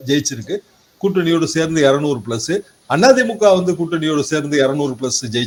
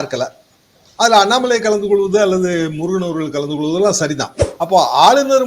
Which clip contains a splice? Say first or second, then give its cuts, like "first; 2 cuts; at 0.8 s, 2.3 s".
second; 1 cut; at 4.4 s